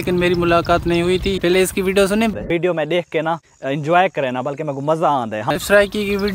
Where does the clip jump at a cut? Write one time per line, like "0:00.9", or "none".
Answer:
0:01.4
0:05.5